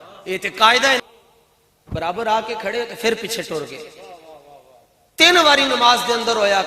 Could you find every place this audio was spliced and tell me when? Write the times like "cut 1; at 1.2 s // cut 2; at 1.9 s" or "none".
cut 1; at 1.0 s